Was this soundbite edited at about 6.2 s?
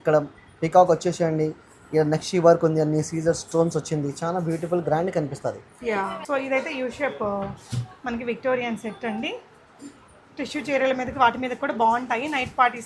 yes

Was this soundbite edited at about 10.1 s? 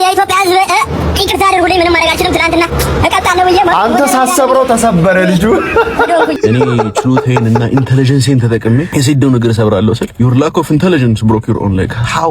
yes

